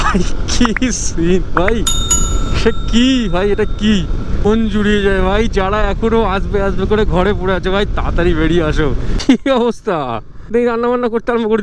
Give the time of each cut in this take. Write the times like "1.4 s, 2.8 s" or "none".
4.5 s, 9.1 s, 10.5 s

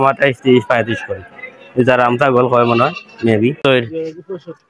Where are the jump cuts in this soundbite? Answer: 3.6 s

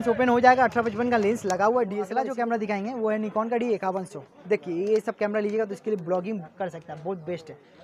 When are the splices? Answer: 2.3 s

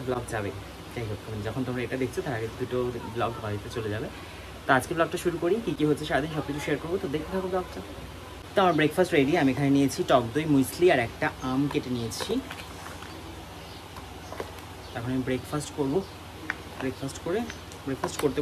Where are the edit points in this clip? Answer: none

